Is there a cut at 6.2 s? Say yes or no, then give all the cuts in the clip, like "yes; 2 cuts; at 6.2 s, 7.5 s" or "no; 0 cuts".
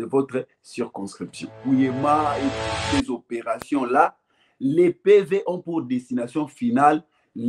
no; 1 cut; at 1.6 s